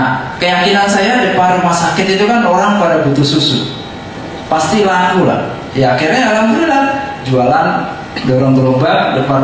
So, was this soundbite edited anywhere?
no; 0 cuts

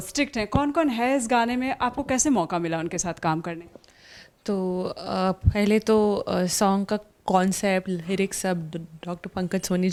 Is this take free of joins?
yes; 0 cuts

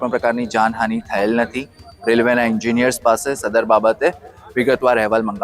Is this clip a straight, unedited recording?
yes; 0 cuts

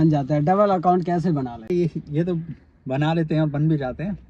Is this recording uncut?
yes; 0 cuts

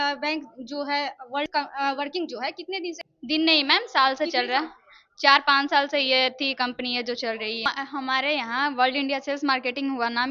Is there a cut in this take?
yes; 3 cuts; at 1.5 s, 3.1 s, 7.7 s

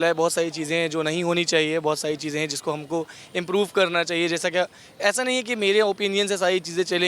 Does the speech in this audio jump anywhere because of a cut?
no; 0 cuts

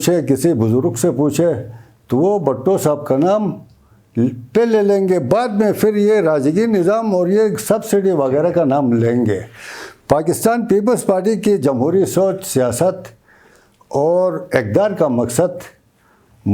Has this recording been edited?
no; 0 cuts

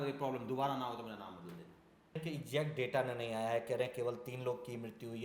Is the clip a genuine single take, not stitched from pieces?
no; 1 cut; at 2.2 s

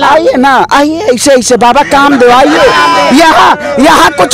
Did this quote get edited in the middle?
no; 0 cuts

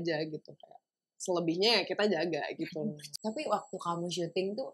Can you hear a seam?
yes; 1 cut; at 3.0 s

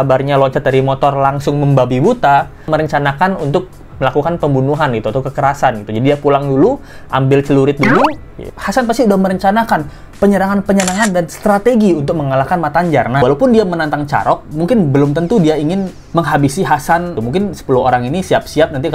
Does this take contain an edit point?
yes; 5 cuts; at 2.7 s, 8.5 s, 13.2 s, 16.0 s, 17.2 s

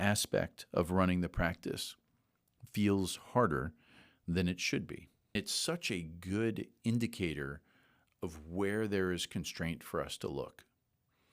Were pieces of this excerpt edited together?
yes; 1 cut; at 5.4 s

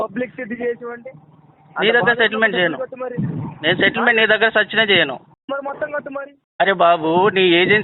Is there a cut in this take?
yes; 1 cut; at 6.6 s

